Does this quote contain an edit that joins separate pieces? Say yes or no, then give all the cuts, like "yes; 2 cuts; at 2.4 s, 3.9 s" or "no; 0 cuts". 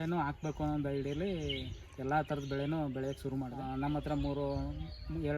yes; 1 cut; at 3.5 s